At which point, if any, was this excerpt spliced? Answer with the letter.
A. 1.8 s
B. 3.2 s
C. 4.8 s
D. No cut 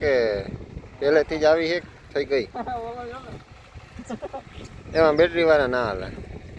D